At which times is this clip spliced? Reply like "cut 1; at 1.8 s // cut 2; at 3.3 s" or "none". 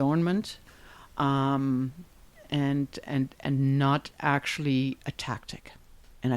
none